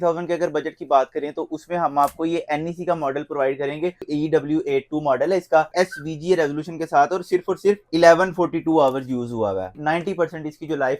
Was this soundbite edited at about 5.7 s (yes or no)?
yes